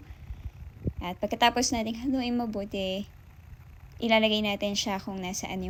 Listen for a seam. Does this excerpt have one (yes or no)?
no